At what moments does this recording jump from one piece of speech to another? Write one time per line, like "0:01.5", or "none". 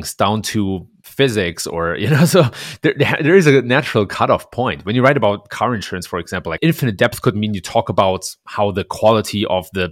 none